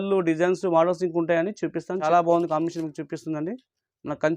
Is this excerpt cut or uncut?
cut